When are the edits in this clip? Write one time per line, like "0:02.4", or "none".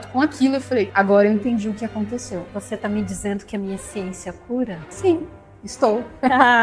0:00.9
0:02.5
0:04.8